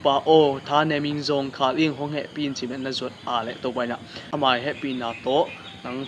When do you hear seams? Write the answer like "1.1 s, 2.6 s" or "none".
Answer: 4.2 s